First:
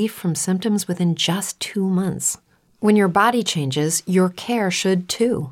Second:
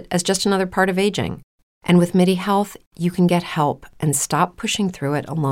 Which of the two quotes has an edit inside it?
first; 1 cut; at 1.5 s

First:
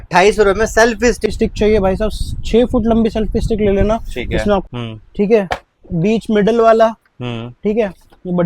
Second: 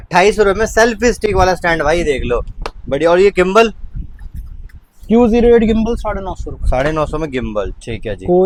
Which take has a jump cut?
first; 2 cuts; at 1.3 s, 4.7 s

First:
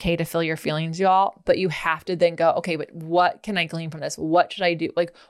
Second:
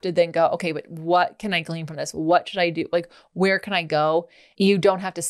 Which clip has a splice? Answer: second; 1 cut; at 4.4 s

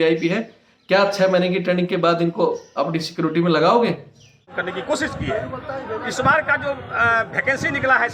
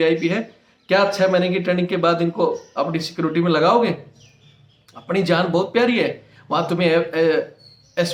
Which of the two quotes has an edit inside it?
first; 1 cut; at 4.5 s

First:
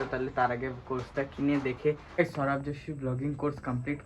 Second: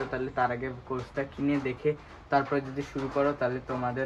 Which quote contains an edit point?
first; 1 cut; at 2.0 s

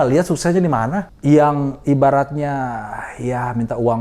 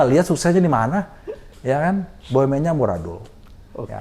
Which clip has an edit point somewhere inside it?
first; 1 cut; at 1.1 s

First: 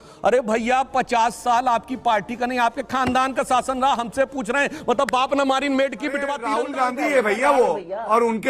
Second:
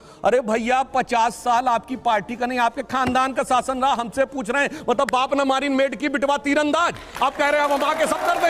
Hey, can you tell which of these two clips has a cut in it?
first; 1 cut; at 6.4 s

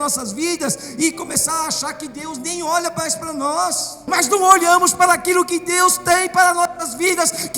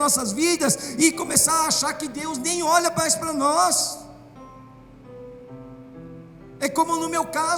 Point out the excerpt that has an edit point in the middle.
first; 1 cut; at 4.0 s

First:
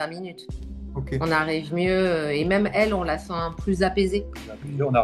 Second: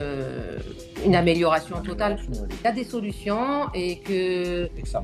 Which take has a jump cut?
second; 1 cut; at 2.6 s

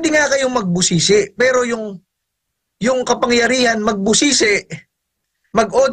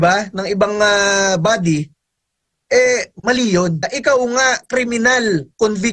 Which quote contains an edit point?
second; 1 cut; at 3.9 s

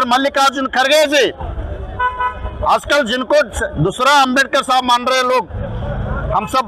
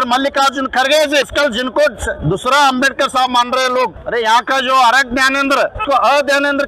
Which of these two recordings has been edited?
second; 3 cuts; at 1.2 s, 4.0 s, 5.8 s

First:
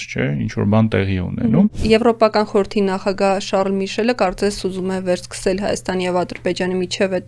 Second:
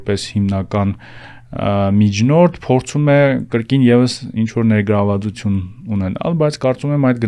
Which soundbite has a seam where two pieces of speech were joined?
first; 1 cut; at 1.8 s

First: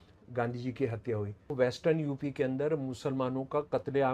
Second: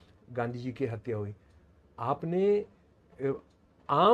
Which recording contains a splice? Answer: first; 1 cut; at 1.5 s

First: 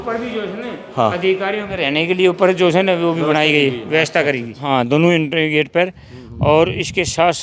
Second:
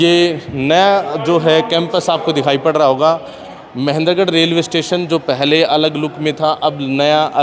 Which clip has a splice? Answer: first; 1 cut; at 4.7 s

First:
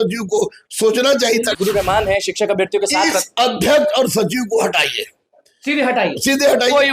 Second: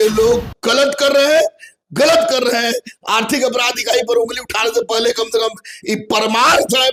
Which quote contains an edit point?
first; 1 cut; at 1.6 s

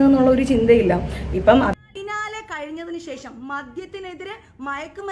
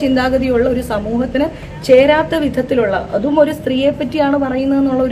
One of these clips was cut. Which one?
first; 1 cut; at 1.7 s

